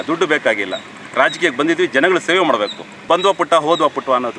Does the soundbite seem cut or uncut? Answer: cut